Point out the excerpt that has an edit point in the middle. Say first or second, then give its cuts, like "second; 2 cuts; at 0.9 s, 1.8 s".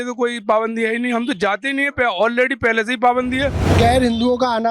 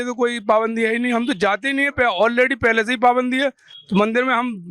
first; 1 cut; at 3.7 s